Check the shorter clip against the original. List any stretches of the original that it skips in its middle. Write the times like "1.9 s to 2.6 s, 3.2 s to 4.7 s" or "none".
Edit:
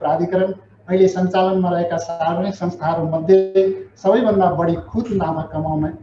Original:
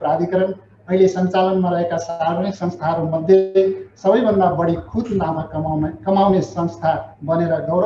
none

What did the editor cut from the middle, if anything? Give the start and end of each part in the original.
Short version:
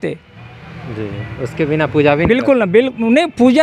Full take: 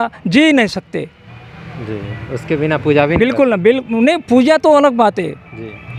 none

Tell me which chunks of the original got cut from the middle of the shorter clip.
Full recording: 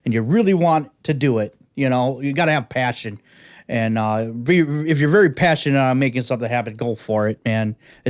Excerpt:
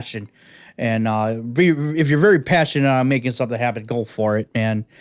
none

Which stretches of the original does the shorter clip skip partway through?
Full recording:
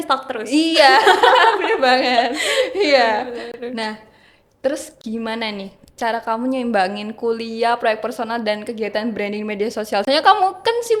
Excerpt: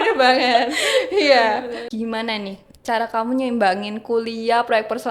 3.5 s to 5.0 s

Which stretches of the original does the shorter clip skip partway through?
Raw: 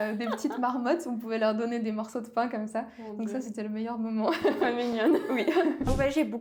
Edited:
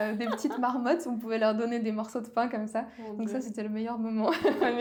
none

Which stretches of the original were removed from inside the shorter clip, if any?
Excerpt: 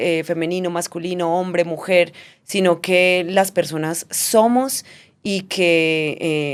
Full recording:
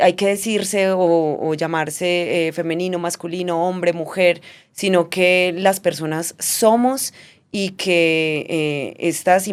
none

